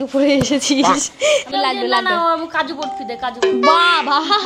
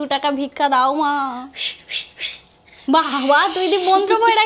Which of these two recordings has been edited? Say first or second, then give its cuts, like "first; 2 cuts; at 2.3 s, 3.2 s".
first; 1 cut; at 1.5 s